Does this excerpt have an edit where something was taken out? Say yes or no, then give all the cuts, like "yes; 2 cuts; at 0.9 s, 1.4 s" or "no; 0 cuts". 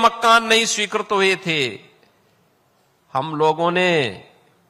no; 0 cuts